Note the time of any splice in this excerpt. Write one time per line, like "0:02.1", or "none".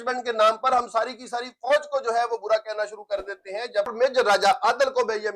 0:03.9